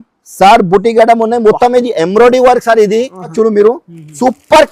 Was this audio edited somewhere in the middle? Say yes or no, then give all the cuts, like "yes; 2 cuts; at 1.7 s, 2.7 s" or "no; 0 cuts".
yes; 1 cut; at 3.3 s